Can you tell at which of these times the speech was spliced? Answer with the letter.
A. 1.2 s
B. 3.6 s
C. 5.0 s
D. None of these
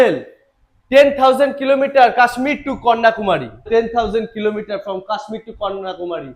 B